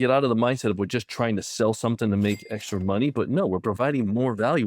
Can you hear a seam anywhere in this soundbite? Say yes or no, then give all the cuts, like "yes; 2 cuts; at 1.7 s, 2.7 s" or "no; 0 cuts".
no; 0 cuts